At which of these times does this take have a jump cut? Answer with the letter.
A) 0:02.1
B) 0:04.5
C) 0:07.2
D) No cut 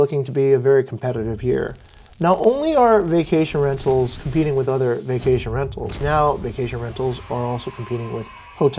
D